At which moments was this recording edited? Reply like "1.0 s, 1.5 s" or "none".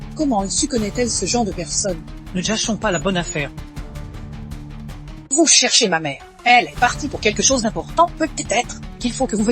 3.5 s, 5.3 s